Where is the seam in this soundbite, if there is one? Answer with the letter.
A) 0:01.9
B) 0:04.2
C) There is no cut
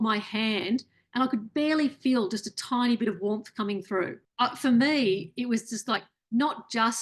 B